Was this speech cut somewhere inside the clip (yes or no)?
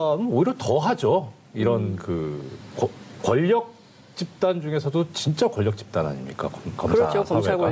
no